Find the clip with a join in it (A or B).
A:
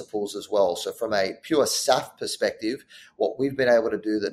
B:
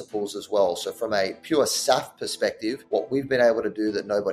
B